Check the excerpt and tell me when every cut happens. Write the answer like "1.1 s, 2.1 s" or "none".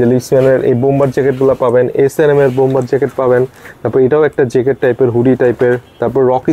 none